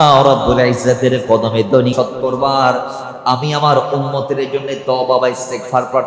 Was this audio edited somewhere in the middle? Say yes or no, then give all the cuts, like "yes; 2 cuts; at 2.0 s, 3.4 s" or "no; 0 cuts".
yes; 1 cut; at 1.9 s